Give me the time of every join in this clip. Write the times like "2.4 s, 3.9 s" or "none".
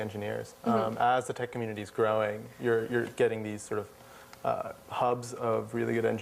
2.3 s